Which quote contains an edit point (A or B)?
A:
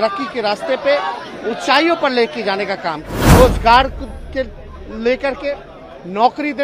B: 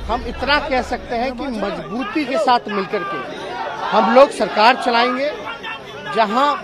A